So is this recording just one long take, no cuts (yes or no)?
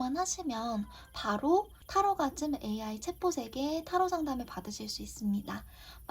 no